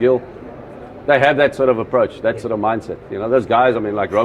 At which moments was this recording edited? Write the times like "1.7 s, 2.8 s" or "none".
none